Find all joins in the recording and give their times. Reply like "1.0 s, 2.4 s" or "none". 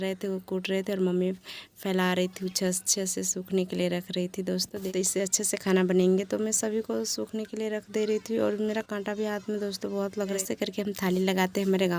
4.8 s, 10.4 s